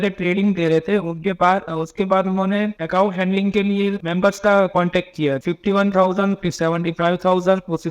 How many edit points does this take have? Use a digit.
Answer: 1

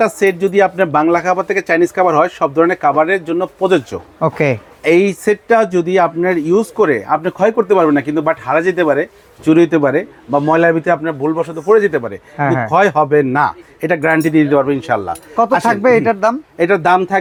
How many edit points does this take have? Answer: 0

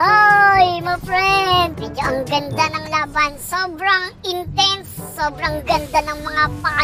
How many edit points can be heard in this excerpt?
1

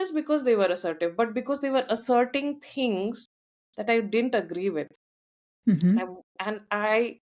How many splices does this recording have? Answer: 0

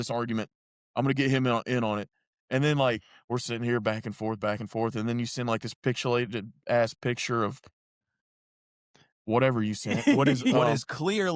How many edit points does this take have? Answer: 0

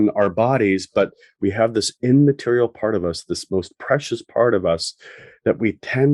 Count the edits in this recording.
1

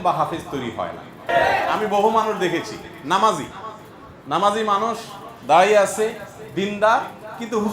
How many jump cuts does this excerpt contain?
1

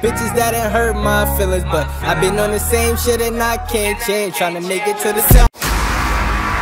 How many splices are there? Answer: 1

